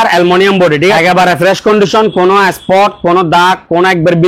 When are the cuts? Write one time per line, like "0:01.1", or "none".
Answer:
0:00.9